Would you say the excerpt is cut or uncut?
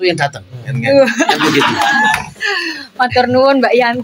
uncut